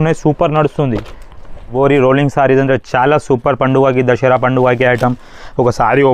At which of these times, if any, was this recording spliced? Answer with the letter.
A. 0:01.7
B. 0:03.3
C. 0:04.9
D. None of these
A